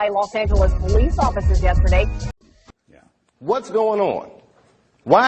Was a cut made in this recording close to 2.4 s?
yes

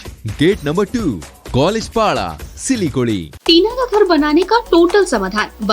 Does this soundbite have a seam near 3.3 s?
yes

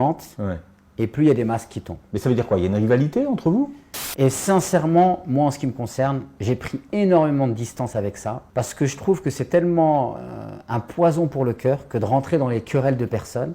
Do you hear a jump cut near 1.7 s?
no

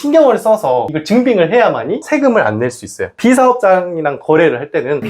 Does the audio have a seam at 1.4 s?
no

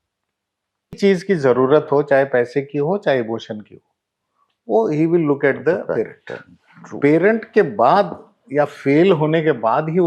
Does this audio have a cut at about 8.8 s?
no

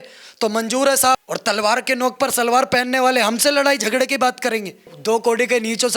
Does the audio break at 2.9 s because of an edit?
no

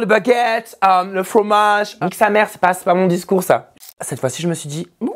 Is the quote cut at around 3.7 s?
yes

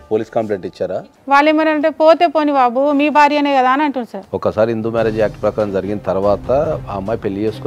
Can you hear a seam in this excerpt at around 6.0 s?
no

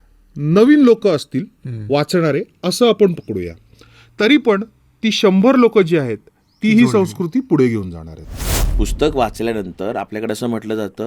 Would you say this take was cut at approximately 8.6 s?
yes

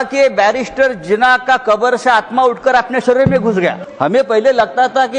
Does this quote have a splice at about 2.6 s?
no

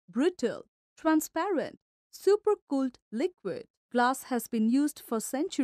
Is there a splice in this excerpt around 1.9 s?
no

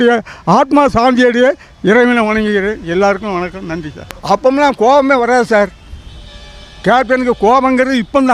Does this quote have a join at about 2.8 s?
no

